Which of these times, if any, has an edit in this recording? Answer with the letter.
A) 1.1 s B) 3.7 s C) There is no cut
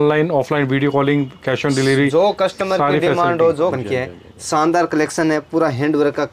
B